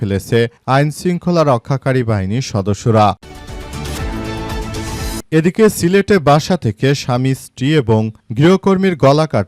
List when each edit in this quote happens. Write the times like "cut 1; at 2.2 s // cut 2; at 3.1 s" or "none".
cut 1; at 3.2 s // cut 2; at 5.2 s